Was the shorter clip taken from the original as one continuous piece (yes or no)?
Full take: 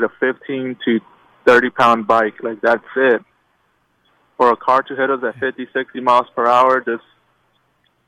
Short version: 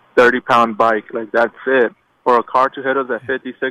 no